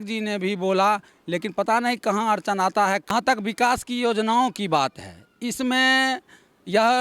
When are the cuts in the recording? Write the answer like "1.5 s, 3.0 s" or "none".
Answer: 3.1 s